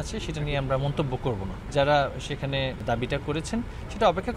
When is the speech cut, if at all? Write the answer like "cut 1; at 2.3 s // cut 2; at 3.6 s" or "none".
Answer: cut 1; at 1.6 s // cut 2; at 2.8 s